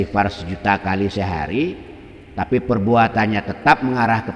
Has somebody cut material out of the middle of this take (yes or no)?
no